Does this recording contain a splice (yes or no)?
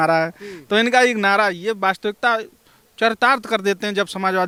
no